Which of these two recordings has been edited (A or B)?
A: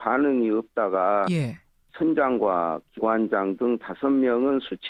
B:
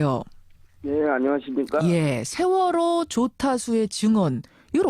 B